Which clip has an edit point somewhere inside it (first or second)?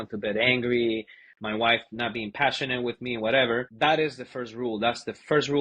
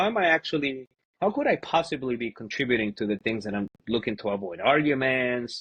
first